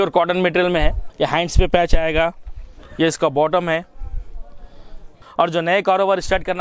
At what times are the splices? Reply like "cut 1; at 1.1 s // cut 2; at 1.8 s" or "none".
cut 1; at 1.0 s // cut 2; at 5.2 s